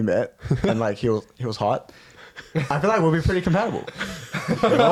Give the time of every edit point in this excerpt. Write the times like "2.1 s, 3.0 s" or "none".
none